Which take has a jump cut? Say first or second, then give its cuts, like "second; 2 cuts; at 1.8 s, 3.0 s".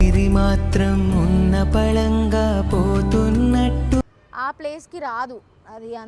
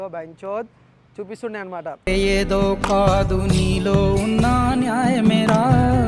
first; 1 cut; at 4.1 s